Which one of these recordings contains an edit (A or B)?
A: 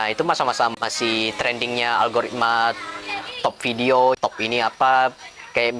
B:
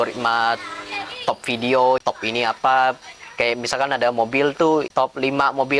B